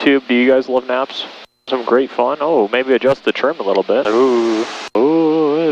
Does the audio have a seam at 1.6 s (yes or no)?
yes